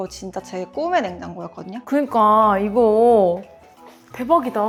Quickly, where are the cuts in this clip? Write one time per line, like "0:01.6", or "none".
none